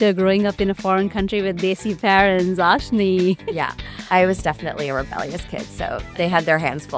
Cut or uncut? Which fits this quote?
uncut